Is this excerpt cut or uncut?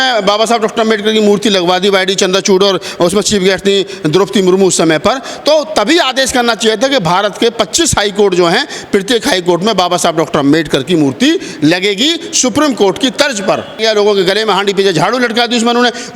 cut